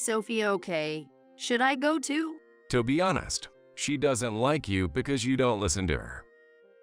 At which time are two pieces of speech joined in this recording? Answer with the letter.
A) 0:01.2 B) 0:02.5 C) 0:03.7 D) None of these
B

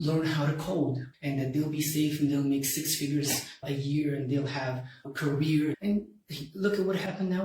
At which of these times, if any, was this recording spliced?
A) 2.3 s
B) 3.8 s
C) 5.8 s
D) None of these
C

